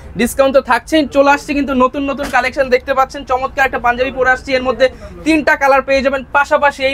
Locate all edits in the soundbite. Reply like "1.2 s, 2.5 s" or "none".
none